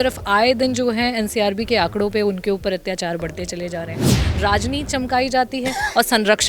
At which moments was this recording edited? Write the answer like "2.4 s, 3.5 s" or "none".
4.2 s